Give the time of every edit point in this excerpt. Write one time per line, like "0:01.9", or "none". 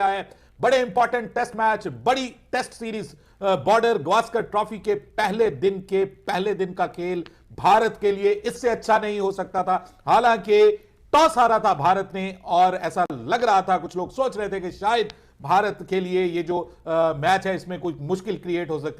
none